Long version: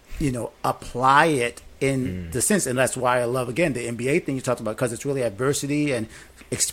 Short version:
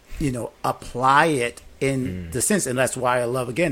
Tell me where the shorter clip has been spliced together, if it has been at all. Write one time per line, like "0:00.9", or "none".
none